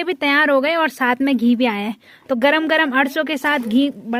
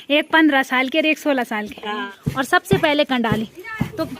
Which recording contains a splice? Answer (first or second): second